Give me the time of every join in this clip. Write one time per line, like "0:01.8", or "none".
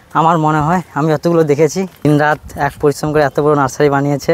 0:02.1